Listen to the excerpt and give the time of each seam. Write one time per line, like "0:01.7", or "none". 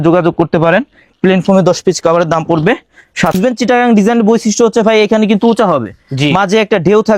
0:03.3